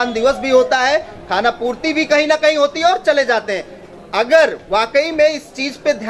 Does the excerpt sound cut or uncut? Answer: uncut